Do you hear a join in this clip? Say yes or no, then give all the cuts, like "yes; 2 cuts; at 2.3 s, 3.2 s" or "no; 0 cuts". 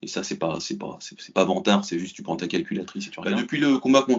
yes; 1 cut; at 3.1 s